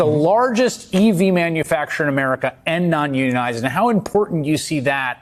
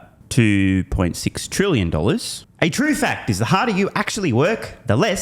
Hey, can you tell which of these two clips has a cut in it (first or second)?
second